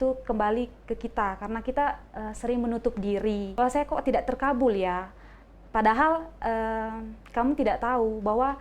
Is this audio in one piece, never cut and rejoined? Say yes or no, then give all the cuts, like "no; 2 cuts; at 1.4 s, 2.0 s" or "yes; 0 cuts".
no; 1 cut; at 3.6 s